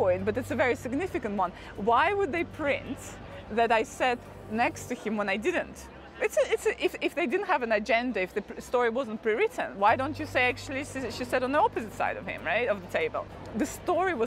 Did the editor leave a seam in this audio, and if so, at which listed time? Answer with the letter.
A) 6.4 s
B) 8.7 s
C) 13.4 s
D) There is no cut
C